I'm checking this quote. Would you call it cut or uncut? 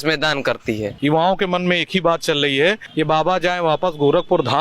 cut